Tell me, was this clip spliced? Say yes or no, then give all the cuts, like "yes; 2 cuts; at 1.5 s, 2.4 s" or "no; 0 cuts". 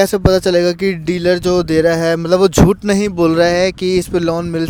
no; 0 cuts